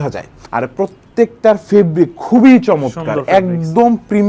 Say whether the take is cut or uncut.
uncut